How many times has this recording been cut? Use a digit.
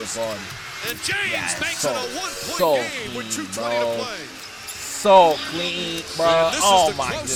0